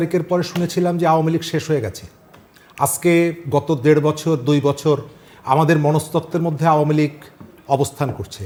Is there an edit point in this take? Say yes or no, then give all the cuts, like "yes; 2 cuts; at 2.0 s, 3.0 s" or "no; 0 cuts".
no; 0 cuts